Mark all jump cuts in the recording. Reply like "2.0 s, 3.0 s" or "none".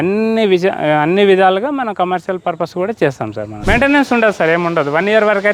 3.5 s